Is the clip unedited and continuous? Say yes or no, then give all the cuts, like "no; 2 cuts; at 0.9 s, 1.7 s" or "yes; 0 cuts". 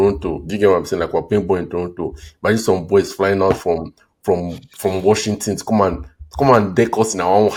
yes; 0 cuts